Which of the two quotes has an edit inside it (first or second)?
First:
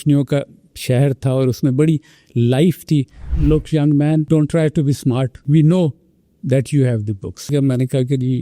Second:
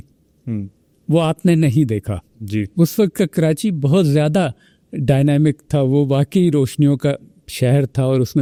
first